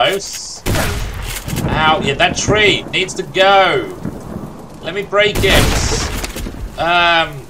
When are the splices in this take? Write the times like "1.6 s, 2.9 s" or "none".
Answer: none